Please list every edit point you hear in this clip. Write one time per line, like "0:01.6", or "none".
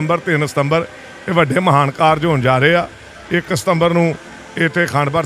none